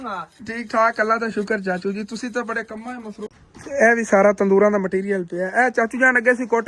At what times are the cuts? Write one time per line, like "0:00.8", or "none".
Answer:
0:03.3